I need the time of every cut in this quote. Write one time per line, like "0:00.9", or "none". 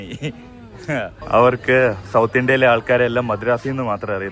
0:01.2